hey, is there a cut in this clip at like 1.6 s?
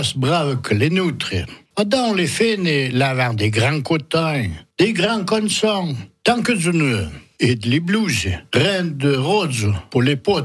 yes; 1 cut; at 1.6 s

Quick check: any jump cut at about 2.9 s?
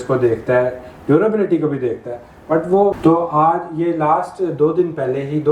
yes; 1 cut; at 2.9 s

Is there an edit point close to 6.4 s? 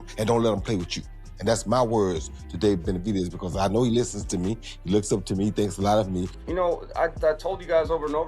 yes; 1 cut; at 6.4 s

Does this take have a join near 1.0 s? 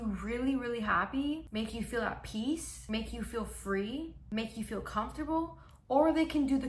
no; 0 cuts

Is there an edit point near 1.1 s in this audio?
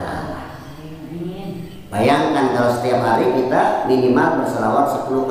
no; 0 cuts

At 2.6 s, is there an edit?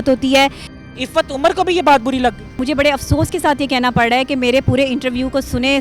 yes; 2 cuts; at 0.8 s, 2.6 s

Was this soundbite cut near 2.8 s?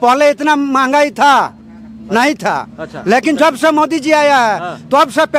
no; 0 cuts

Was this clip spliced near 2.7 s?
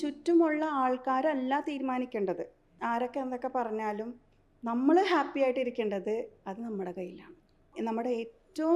yes; 2 cuts; at 2.7 s, 7.7 s

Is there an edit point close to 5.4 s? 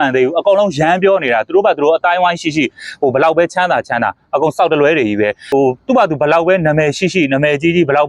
yes; 1 cut; at 5.4 s

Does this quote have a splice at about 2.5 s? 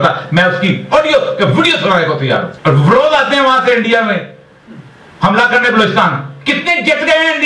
yes; 1 cut; at 2.5 s

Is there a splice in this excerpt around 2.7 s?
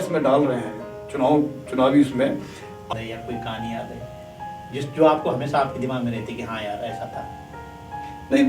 yes; 1 cut; at 2.7 s

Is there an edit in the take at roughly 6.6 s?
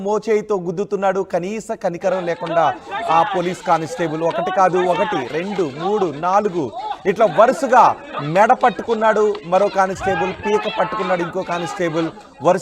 no; 1 cut; at 11.5 s

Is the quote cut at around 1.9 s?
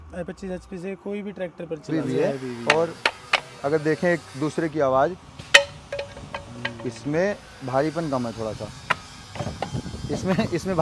yes; 1 cut; at 1.9 s

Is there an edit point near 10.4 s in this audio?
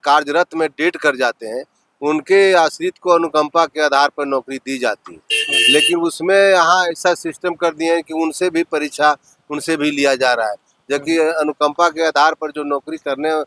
no; 0 cuts

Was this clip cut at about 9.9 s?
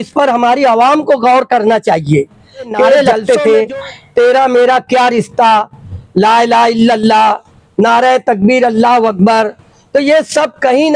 no; 1 cut; at 3.0 s

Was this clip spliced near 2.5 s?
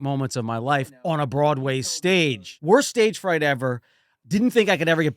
yes; 1 cut; at 2.5 s

